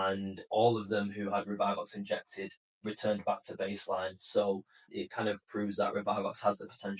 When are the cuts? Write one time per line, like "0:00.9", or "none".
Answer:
0:04.8